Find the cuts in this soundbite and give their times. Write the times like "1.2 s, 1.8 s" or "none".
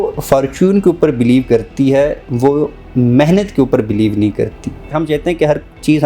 4.9 s